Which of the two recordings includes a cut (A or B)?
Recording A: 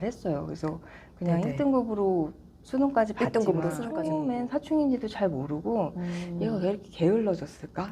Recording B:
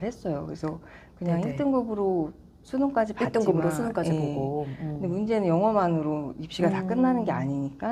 A